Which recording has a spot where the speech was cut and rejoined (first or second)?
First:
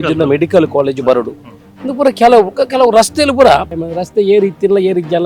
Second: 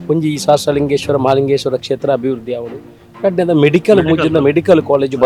first